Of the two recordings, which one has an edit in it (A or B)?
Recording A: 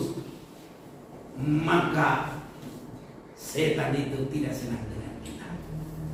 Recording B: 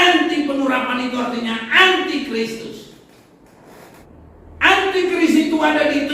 B